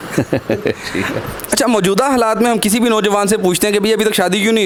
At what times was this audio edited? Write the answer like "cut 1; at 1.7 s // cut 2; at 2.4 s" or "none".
none